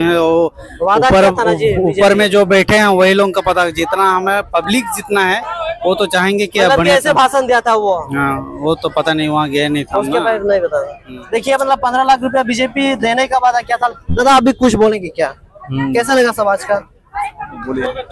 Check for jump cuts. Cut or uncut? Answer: uncut